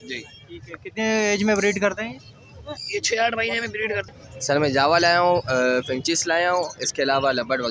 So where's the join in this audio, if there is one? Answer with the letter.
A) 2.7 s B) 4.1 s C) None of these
B